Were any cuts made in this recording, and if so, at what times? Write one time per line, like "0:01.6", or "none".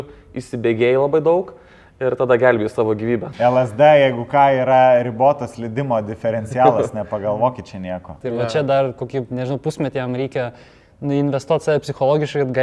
0:03.3
0:08.2